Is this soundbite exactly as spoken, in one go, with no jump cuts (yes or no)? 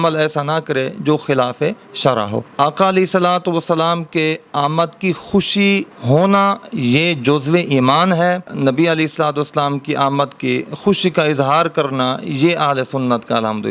no